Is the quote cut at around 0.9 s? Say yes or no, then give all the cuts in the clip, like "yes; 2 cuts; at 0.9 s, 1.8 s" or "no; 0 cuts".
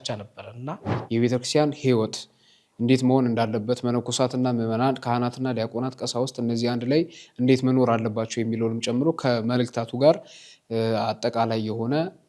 yes; 1 cut; at 0.9 s